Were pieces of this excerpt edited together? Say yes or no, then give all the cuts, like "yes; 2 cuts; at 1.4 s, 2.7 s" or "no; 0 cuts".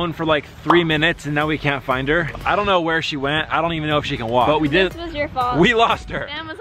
no; 0 cuts